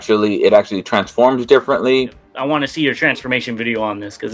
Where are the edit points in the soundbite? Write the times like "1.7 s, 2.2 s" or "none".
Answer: 2.3 s